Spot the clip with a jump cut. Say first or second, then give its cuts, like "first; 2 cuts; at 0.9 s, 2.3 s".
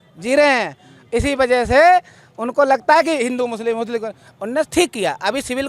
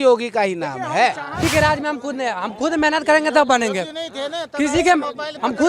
second; 1 cut; at 1.4 s